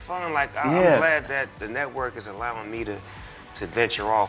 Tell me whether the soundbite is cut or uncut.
uncut